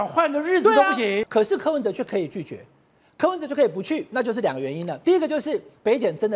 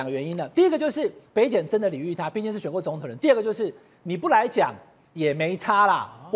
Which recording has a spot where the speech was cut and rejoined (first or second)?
first